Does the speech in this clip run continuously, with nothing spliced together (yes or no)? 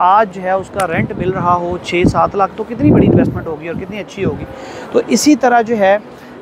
yes